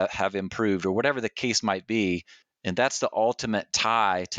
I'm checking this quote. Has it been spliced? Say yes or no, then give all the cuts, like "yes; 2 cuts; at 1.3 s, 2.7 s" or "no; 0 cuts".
no; 0 cuts